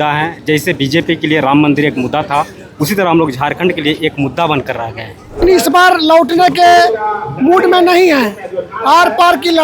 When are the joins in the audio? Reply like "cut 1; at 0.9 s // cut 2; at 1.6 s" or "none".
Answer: cut 1; at 5.4 s